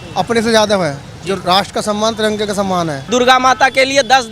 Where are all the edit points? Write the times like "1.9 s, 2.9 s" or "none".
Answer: 3.1 s

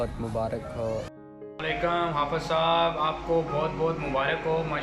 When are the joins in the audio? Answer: 1.1 s

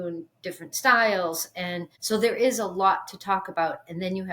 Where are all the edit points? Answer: 1.9 s

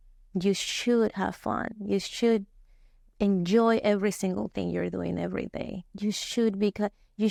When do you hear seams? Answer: none

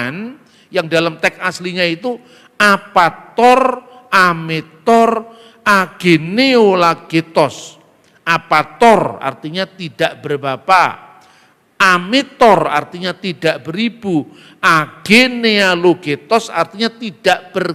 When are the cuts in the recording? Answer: none

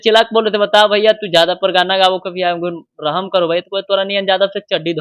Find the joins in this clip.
none

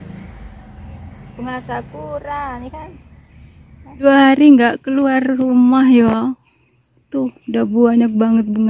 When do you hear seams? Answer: 4.1 s

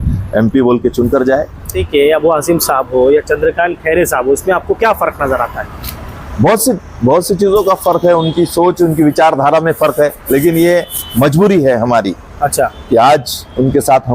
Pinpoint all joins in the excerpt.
1.8 s

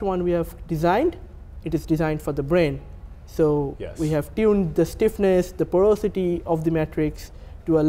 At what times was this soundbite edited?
none

